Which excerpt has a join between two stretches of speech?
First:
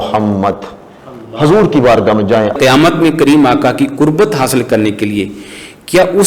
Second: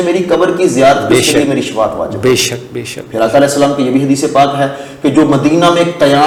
first; 1 cut; at 2.5 s

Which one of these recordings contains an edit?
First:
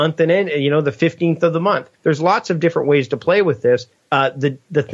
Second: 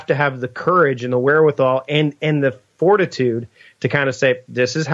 first; 2 cuts; at 1.9 s, 4.0 s

